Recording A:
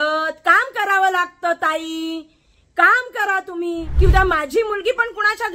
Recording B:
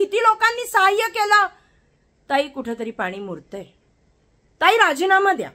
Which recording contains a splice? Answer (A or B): A